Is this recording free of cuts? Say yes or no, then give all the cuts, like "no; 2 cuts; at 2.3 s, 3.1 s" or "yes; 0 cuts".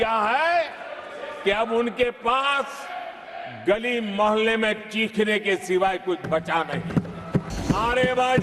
no; 1 cut; at 7.5 s